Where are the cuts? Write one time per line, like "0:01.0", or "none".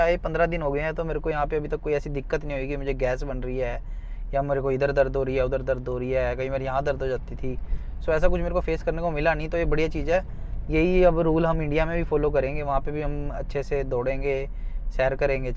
none